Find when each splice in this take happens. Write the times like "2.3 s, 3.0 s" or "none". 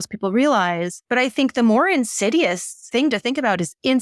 0.9 s, 2.8 s